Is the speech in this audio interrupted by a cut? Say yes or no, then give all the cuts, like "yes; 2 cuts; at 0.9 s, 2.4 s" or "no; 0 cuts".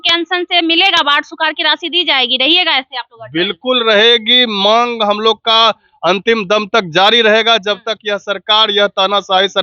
no; 0 cuts